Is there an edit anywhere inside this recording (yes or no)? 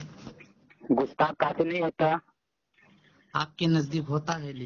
no